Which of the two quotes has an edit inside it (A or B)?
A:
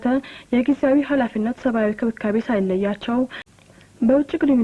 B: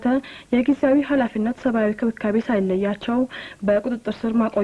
A